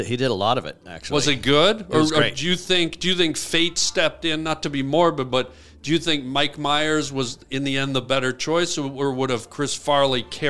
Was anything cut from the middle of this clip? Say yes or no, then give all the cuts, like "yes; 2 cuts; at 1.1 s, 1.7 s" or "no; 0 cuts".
no; 0 cuts